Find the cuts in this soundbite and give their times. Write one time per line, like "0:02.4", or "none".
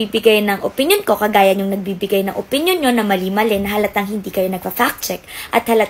none